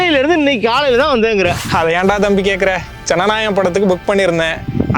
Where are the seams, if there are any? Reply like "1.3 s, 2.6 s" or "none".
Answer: 1.7 s